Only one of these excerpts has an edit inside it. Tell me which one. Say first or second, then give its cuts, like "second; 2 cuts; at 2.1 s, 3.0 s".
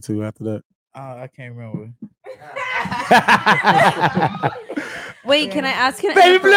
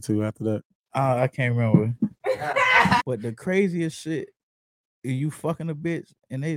second; 1 cut; at 3.0 s